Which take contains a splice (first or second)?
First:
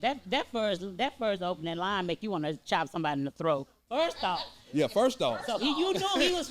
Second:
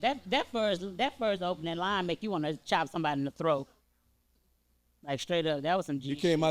first